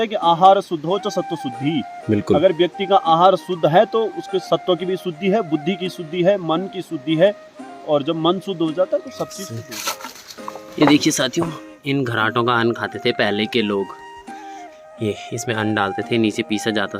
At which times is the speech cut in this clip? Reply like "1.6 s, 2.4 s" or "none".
9.5 s